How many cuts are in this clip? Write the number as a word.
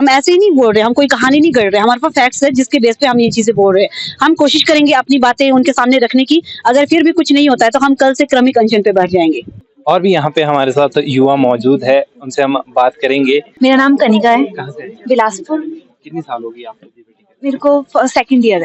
zero